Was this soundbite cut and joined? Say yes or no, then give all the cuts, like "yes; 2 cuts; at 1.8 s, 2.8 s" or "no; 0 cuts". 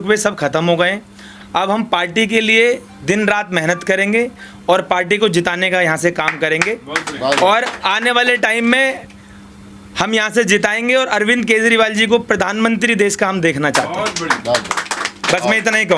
no; 0 cuts